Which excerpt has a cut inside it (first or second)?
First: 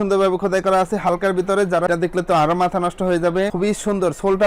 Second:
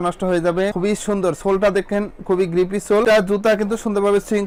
first